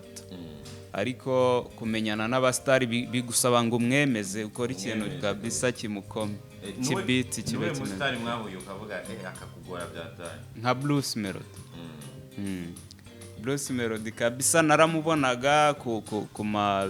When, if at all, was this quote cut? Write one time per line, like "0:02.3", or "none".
none